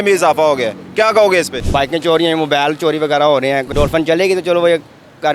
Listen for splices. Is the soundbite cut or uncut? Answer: cut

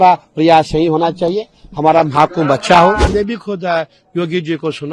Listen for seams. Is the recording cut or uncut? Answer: cut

